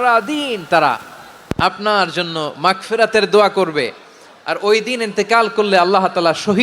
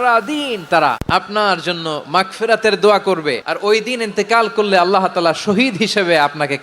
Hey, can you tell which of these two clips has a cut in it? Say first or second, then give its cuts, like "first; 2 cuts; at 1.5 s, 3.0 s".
second; 2 cuts; at 1.0 s, 3.5 s